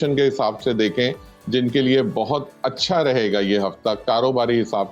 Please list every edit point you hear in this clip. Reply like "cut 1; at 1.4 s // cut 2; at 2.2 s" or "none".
none